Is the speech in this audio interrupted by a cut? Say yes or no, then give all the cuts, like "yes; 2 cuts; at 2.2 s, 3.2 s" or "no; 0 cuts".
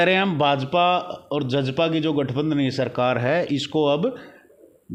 no; 0 cuts